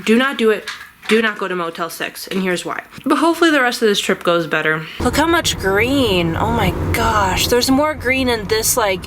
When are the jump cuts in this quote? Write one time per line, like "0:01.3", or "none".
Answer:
0:02.9
0:04.9